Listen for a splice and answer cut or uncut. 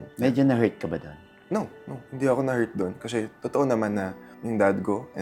uncut